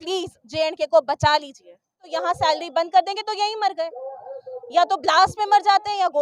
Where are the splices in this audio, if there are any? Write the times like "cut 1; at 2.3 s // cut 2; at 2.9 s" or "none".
cut 1; at 2.1 s